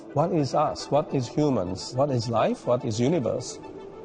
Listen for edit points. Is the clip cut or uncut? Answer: uncut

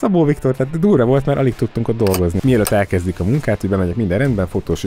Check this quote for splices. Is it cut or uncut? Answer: cut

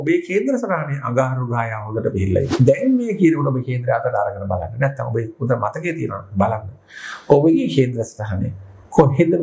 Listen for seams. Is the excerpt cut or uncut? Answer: cut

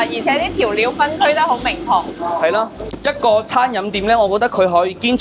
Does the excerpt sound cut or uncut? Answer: cut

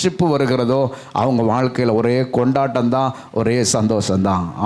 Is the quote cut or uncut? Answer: uncut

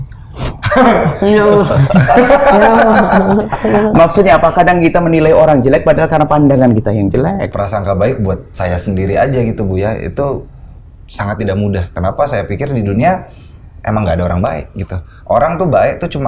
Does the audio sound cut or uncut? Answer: cut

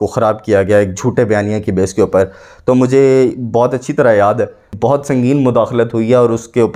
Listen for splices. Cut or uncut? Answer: cut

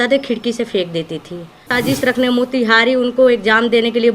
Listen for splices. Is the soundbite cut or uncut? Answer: cut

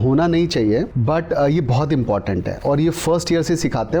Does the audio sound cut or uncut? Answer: cut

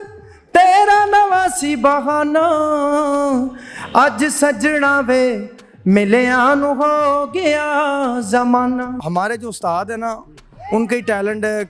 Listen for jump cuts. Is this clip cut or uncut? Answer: cut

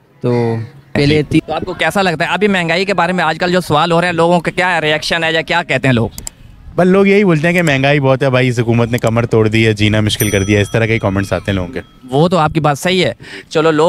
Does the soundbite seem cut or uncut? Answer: cut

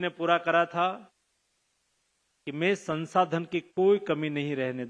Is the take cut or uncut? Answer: uncut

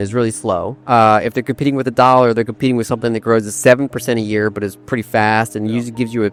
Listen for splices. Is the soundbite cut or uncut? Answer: uncut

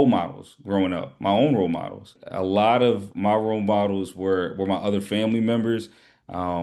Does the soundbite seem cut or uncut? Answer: cut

